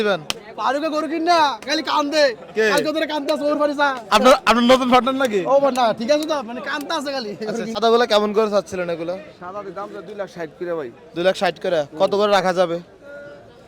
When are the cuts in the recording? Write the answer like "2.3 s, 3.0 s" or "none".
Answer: 7.8 s

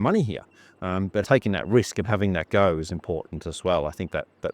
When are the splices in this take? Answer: 1.2 s

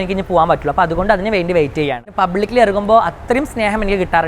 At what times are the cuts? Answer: 2.0 s

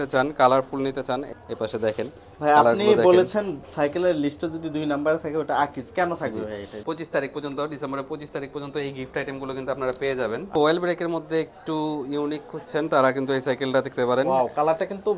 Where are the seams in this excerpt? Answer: 1.3 s, 6.7 s, 10.6 s

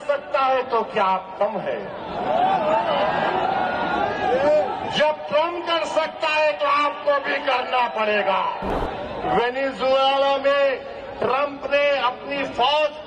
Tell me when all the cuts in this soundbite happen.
8.7 s

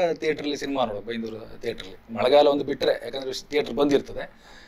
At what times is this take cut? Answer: none

